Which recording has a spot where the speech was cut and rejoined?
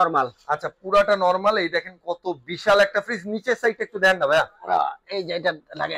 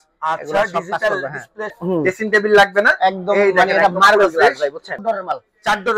second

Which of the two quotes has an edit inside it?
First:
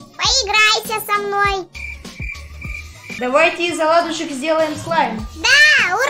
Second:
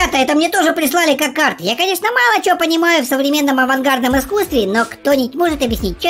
first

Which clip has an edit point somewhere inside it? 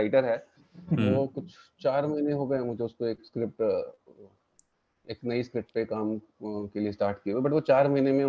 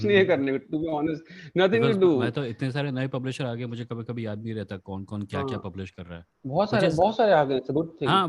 second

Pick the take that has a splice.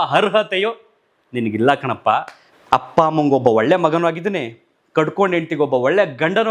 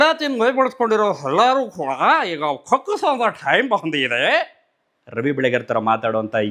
first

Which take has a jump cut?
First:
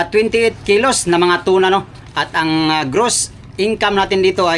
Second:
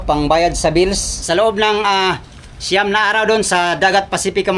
second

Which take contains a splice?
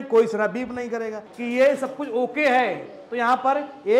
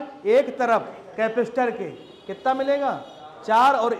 first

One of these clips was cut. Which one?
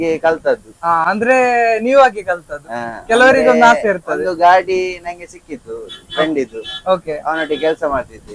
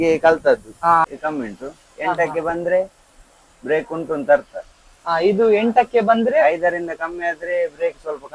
second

